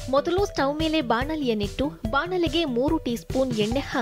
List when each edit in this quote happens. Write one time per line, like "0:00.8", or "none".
none